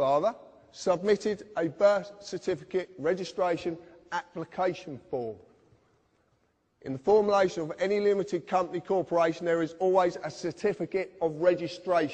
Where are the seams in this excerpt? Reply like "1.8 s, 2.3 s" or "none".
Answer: 4.3 s